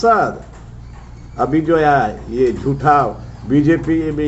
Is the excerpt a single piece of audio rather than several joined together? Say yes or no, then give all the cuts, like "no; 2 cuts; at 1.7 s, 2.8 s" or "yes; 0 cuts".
yes; 0 cuts